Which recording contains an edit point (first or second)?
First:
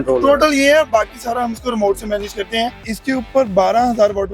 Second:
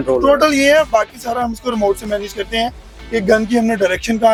first